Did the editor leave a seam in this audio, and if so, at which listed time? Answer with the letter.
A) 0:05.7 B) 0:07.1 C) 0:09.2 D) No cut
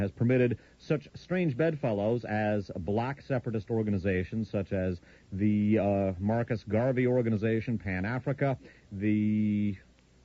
B